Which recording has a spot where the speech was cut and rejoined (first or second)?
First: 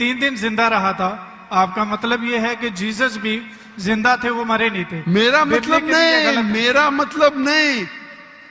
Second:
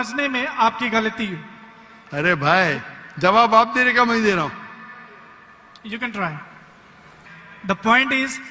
second